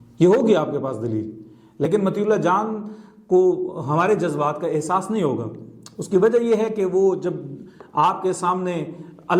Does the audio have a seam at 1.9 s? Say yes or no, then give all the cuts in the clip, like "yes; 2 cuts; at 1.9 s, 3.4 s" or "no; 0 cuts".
yes; 1 cut; at 1.9 s